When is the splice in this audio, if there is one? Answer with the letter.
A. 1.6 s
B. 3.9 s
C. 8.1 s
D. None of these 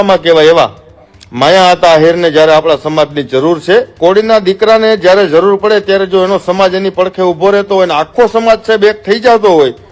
B